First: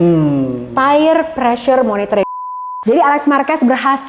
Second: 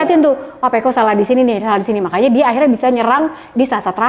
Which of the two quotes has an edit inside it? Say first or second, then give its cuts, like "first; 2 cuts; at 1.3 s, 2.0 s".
first; 1 cut; at 2.4 s